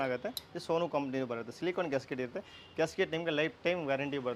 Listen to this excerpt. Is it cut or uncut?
uncut